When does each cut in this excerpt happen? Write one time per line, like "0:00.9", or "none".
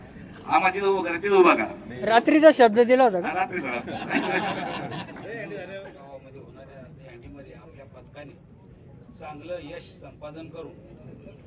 0:02.1
0:05.9